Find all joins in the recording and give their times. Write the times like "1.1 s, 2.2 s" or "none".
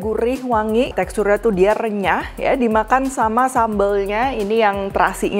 0.9 s